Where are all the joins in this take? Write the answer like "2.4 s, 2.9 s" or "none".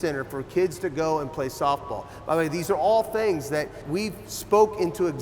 3.8 s